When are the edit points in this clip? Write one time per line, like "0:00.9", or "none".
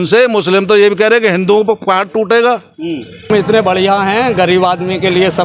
0:03.3